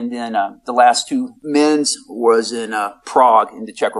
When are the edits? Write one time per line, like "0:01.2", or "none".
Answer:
0:01.4